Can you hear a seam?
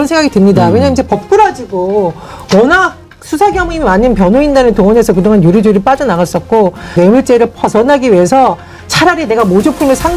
yes; 1 cut; at 6.9 s

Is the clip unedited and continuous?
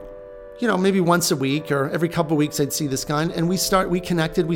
yes; 0 cuts

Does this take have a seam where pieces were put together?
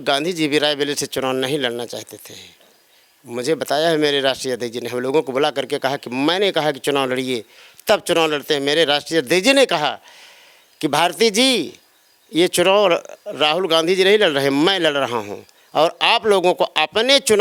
no; 0 cuts

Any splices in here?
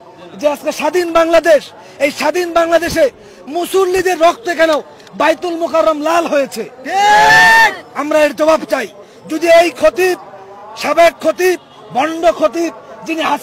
no; 0 cuts

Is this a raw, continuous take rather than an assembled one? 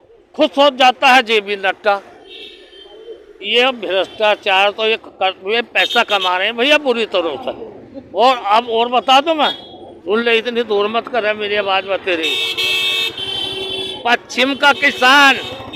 yes; 0 cuts

